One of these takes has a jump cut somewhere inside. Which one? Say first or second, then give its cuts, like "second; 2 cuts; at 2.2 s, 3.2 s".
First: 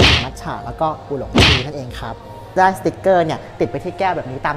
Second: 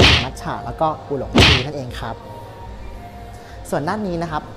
first; 1 cut; at 2.6 s